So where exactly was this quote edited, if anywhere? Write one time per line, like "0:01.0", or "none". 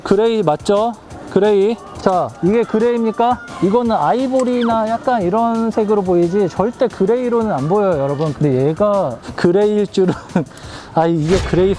0:08.3